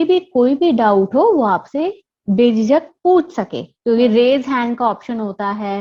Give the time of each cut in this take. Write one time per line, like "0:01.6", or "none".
none

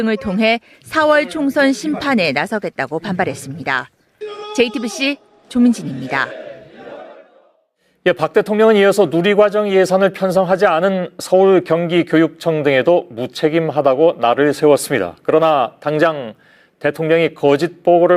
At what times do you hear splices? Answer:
0:09.5

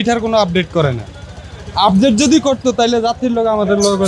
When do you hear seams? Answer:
none

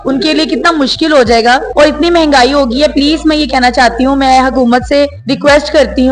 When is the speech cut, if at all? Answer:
0:01.7
0:05.2

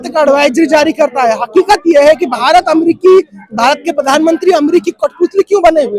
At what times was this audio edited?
none

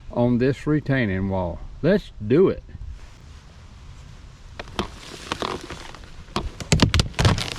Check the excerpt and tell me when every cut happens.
0:03.2

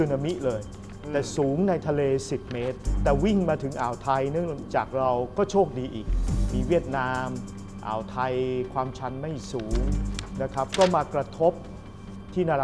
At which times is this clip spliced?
0:03.0

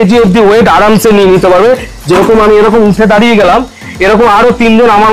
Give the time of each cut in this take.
none

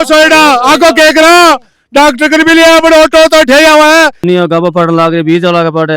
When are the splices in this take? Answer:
0:04.2

